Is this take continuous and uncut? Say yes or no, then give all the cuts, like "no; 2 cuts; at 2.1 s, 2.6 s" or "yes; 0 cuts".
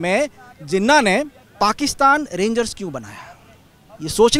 no; 1 cut; at 1.4 s